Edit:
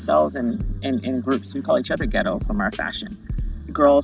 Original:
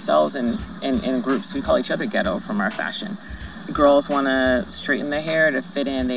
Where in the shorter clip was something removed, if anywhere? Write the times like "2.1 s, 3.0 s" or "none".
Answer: none

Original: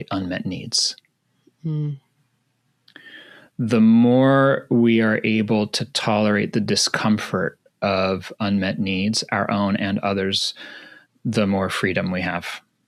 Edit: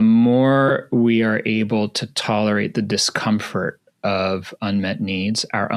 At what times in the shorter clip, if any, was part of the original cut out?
none

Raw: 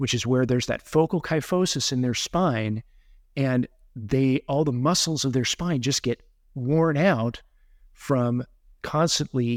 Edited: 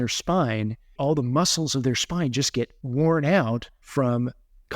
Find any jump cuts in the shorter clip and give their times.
0.9 s, 2.8 s, 3.8 s

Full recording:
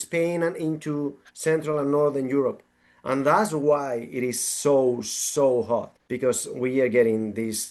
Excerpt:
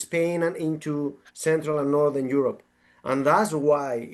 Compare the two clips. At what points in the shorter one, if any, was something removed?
none

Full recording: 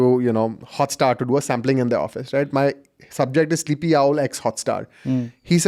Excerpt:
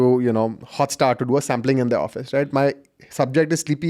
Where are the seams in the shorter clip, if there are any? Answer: none

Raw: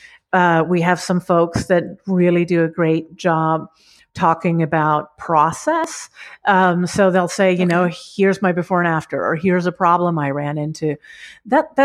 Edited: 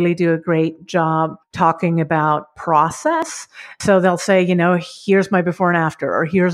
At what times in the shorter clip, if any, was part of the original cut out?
1.4 s, 3.8 s

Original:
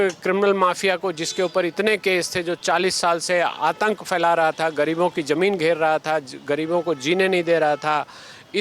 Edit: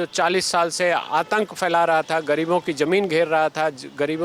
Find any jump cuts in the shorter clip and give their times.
none

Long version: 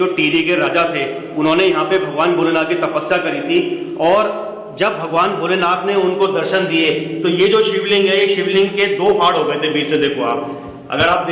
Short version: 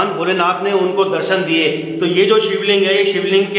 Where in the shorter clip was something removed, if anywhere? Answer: none

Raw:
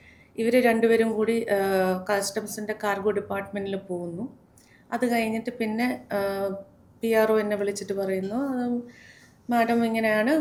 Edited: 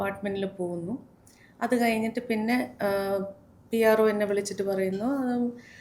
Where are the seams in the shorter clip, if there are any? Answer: none

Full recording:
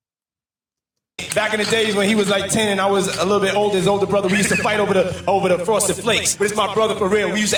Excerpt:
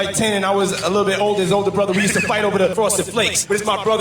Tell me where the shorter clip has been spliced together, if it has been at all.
2.7 s

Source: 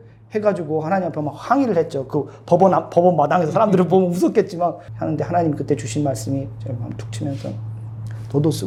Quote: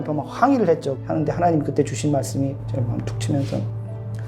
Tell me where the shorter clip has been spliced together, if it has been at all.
0.9 s

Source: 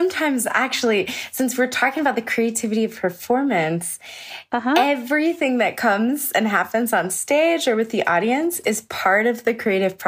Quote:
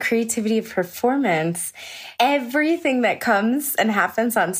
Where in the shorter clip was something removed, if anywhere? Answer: 2.2 s

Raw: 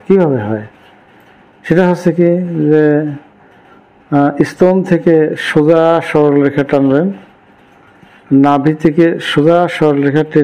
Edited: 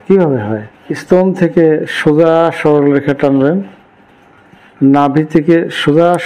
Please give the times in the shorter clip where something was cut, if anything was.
0.9 s

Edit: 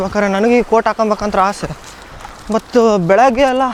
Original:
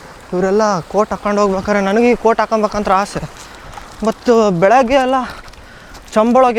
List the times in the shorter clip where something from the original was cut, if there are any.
none

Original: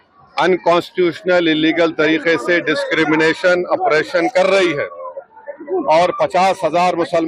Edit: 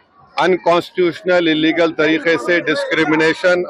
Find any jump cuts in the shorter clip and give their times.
none

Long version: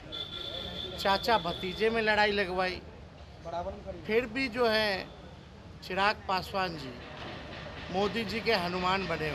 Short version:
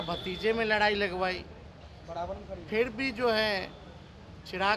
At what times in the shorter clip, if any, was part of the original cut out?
none

